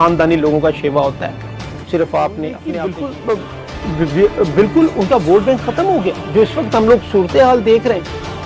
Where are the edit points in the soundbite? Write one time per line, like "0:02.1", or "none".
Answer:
0:02.7